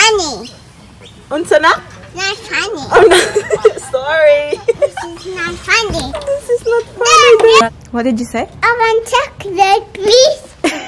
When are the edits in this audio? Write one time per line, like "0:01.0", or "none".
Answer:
0:07.8